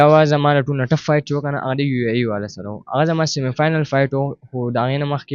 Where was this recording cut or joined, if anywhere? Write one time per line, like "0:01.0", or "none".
none